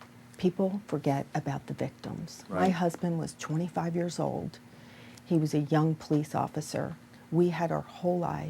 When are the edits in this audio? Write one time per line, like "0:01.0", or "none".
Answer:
0:02.6